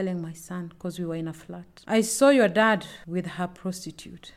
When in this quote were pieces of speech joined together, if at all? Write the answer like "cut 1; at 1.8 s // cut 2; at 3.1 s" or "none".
cut 1; at 3.0 s